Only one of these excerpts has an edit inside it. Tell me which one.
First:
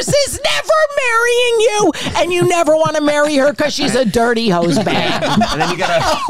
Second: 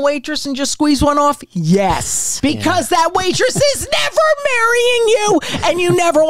second; 1 cut; at 2.2 s

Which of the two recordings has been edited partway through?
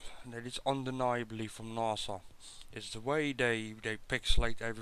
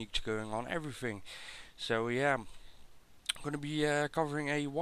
first; 1 cut; at 1.6 s

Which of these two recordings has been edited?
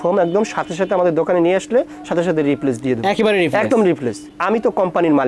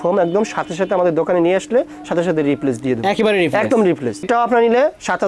second; 1 cut; at 4.2 s

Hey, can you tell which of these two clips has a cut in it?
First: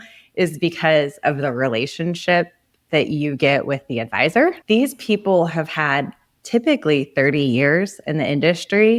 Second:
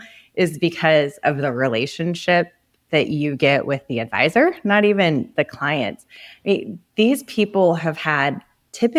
first; 1 cut; at 4.6 s

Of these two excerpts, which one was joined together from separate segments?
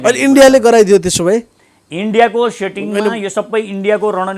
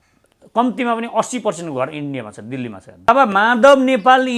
second; 1 cut; at 3.1 s

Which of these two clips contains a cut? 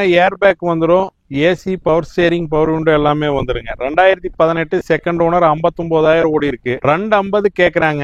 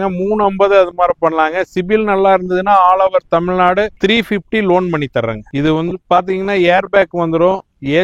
second; 1 cut; at 5.5 s

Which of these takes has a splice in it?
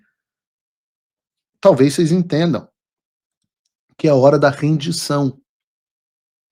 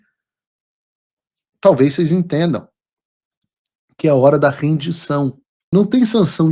second; 1 cut; at 5.5 s

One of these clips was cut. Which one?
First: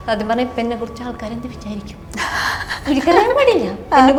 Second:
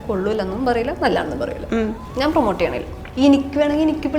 second; 2 cuts; at 2.0 s, 3.0 s

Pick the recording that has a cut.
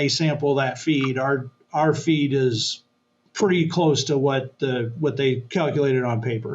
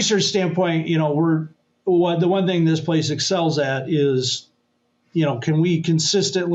first; 1 cut; at 5.4 s

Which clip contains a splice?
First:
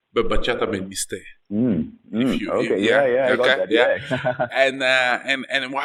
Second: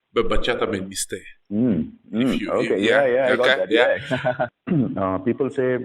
second; 1 cut; at 4.5 s

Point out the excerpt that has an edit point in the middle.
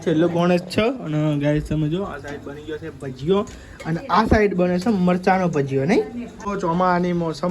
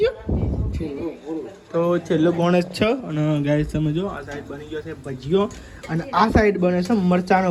first; 1 cut; at 6.5 s

